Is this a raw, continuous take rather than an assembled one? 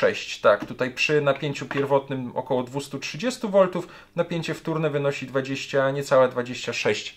yes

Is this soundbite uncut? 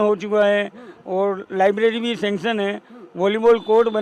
yes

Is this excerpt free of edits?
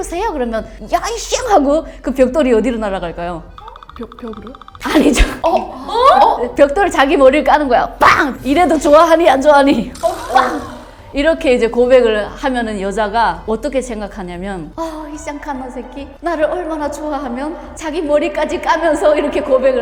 yes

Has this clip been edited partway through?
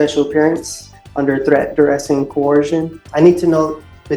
yes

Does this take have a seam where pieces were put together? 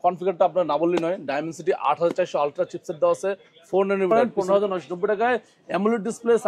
yes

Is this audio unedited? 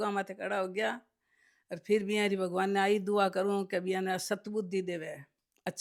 yes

